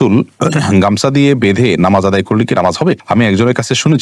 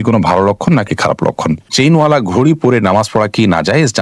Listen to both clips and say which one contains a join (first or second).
second